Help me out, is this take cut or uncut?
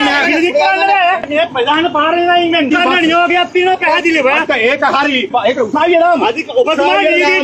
cut